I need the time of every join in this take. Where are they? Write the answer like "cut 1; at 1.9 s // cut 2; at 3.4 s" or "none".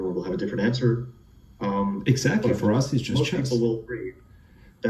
cut 1; at 3.4 s